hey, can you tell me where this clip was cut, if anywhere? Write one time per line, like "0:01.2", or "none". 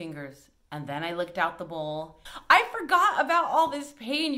0:02.2